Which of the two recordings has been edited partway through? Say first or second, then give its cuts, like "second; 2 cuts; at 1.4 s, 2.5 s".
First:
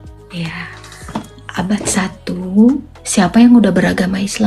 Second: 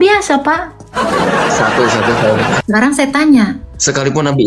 second; 1 cut; at 2.6 s